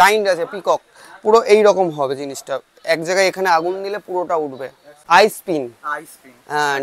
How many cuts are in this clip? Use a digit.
1